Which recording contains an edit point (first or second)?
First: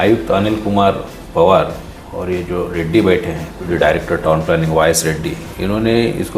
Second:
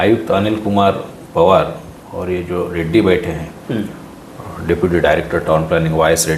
first